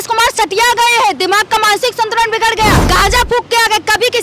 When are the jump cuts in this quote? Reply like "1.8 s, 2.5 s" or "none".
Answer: 2.8 s